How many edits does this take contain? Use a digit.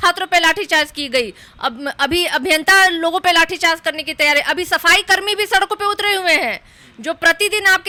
0